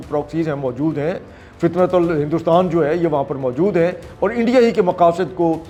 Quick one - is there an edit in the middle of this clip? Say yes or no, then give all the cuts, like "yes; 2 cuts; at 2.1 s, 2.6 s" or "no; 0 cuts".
no; 0 cuts